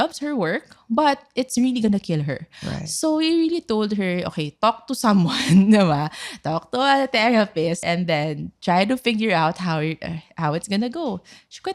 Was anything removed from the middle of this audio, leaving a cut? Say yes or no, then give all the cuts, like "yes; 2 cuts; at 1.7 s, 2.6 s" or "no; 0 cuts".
yes; 1 cut; at 7.8 s